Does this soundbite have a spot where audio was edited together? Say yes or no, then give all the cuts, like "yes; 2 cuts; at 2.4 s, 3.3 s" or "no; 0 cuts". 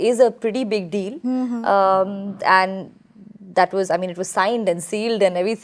no; 0 cuts